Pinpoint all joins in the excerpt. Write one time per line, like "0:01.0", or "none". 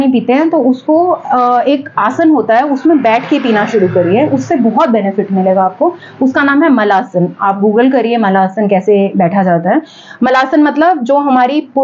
none